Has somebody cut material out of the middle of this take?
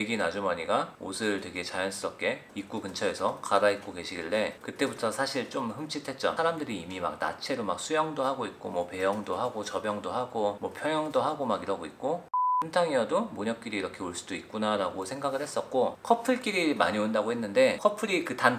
yes; 3 cuts; at 6.4 s, 12.4 s, 15.9 s

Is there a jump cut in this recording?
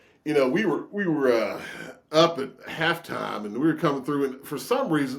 no; 0 cuts

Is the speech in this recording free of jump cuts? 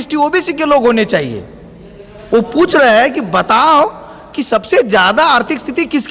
yes; 0 cuts

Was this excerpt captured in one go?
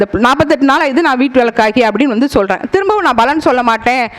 yes; 0 cuts

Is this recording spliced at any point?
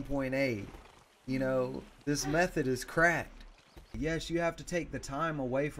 yes; 1 cut; at 3.9 s

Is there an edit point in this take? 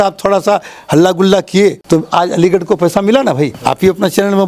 yes; 2 cuts; at 1.8 s, 3.6 s

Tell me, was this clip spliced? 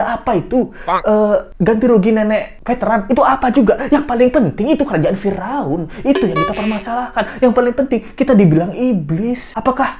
no; 0 cuts

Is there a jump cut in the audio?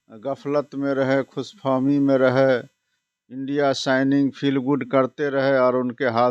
no; 0 cuts

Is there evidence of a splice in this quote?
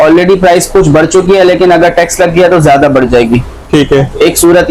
no; 0 cuts

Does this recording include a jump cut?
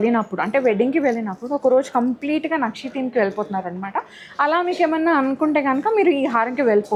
no; 0 cuts

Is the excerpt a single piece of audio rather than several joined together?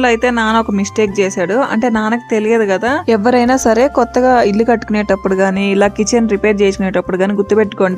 yes; 0 cuts

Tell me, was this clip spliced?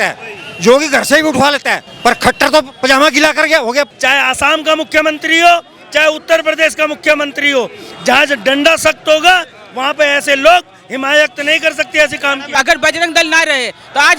yes; 2 cuts; at 3.9 s, 12.5 s

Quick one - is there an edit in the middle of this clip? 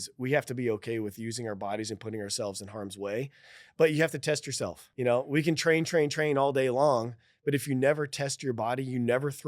yes; 1 cut; at 4.9 s

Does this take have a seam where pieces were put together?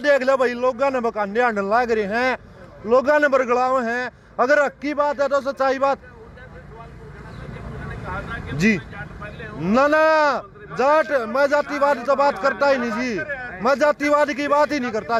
no; 0 cuts

